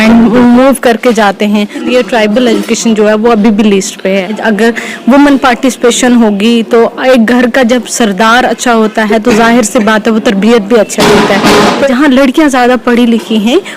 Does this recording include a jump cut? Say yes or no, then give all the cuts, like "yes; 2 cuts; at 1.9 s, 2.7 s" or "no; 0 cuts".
yes; 3 cuts; at 1.8 s, 4.4 s, 11.9 s